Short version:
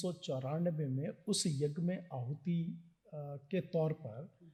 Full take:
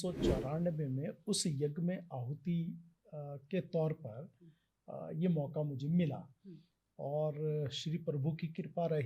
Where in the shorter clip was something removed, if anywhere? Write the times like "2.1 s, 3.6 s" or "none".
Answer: none